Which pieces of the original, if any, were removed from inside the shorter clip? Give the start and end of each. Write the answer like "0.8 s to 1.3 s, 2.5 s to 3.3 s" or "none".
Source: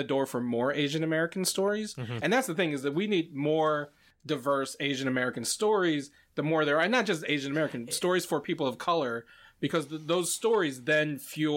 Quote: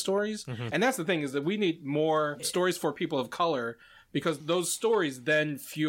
3.9 s to 7.9 s, 9.9 s to 10.0 s